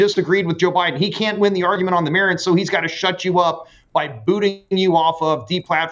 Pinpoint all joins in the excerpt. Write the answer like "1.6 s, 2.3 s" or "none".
none